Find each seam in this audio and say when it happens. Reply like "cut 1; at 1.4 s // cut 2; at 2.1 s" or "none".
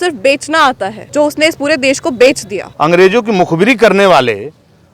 cut 1; at 0.9 s // cut 2; at 2.6 s